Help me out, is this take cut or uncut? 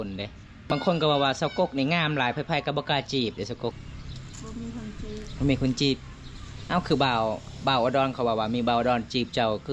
cut